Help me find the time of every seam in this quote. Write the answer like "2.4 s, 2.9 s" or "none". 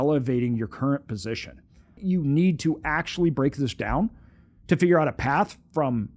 2.0 s